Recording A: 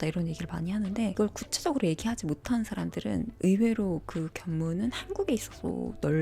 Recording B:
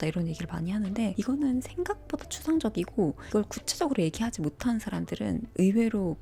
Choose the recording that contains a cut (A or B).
A